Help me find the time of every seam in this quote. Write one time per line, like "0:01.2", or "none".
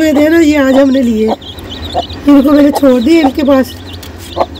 0:02.0